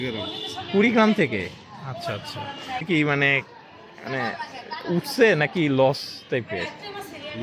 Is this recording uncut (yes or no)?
no